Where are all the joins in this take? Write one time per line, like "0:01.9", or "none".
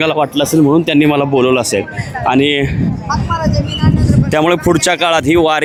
none